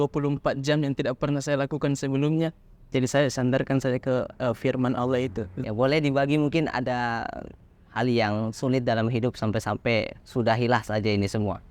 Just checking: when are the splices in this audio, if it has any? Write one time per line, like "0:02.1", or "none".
0:05.5